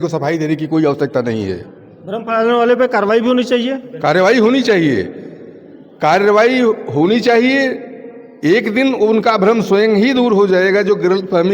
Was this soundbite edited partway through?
no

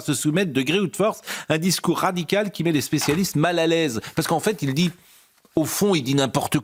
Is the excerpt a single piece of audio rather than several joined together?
yes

